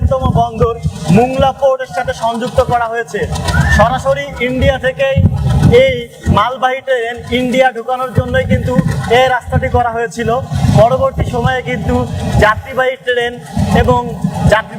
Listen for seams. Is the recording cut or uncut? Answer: uncut